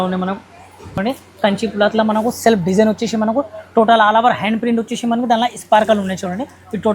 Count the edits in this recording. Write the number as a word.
one